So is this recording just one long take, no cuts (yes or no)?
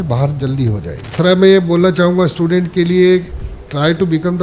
no